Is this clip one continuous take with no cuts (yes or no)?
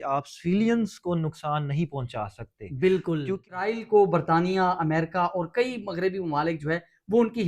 no